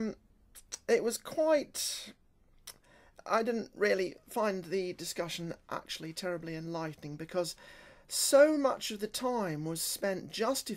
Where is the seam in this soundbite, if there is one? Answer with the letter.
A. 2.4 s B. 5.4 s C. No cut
B